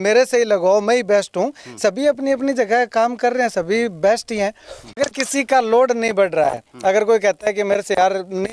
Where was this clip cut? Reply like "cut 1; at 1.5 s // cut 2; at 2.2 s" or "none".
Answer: cut 1; at 5.0 s